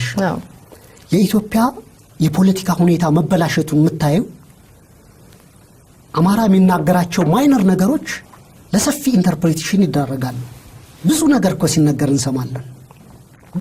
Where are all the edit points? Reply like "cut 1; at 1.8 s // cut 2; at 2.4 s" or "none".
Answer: none